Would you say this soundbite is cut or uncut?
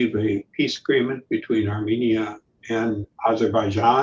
uncut